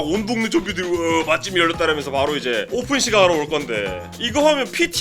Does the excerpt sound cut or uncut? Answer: cut